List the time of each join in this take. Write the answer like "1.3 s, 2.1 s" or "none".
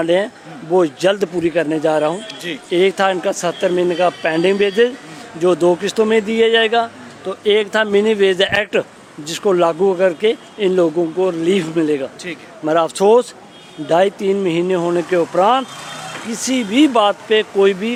none